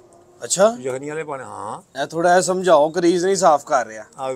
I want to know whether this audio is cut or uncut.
uncut